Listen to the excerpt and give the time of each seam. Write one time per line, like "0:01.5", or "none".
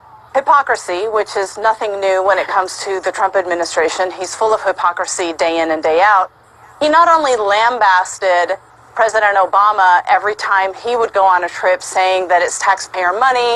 0:01.6